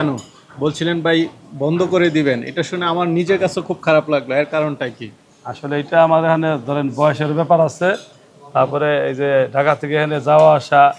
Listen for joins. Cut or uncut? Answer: uncut